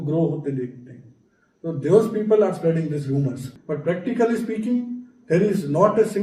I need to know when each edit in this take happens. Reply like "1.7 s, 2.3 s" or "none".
3.5 s

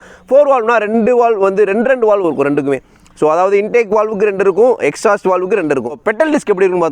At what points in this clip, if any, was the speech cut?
5.9 s

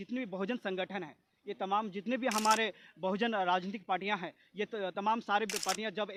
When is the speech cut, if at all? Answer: none

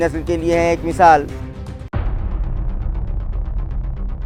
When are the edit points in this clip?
none

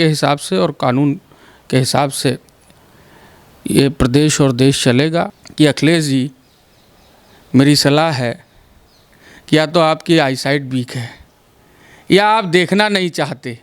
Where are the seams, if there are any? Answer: 5.4 s

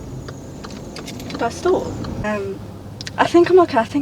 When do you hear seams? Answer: 2.2 s

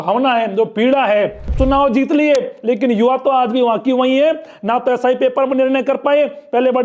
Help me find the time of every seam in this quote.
1.4 s

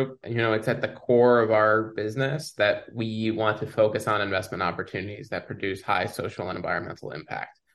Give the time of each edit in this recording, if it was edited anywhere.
none

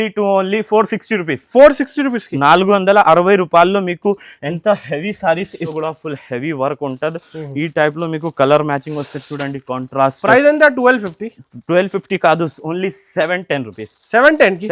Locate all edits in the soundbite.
5.7 s

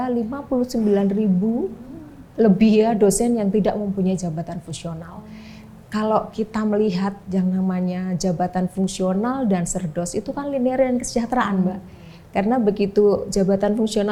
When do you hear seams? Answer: none

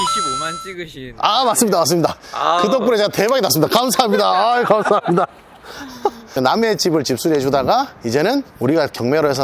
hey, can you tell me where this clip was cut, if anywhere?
6.2 s

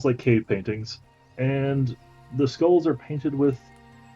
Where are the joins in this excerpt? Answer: 0.9 s

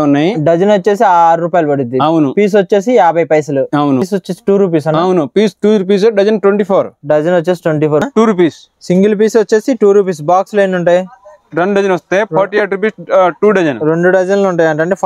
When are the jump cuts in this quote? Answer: 4.1 s, 8.0 s

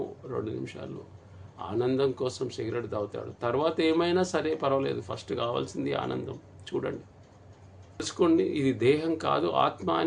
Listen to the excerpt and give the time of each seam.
8.1 s

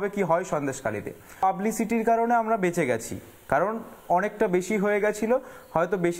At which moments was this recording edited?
1.4 s

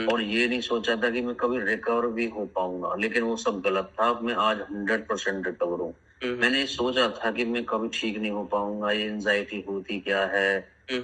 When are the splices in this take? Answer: none

